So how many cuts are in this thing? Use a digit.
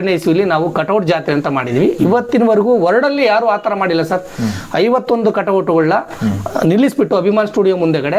0